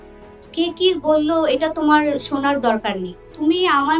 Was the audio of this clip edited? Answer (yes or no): no